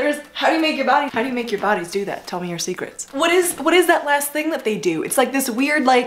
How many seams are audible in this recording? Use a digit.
1